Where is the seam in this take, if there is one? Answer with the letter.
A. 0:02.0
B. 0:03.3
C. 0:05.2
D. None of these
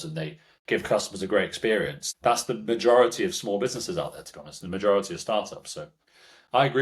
A